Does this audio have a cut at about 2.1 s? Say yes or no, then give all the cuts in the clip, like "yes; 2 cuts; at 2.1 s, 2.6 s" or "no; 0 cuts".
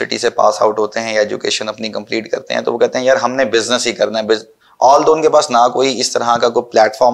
no; 0 cuts